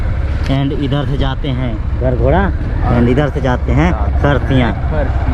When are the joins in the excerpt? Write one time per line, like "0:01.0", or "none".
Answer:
none